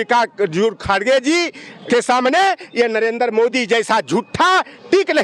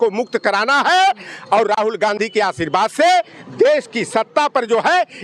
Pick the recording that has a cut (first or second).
first